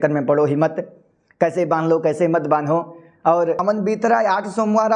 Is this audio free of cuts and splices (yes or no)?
no